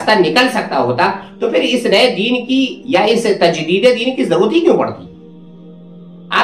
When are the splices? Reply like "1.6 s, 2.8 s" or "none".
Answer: none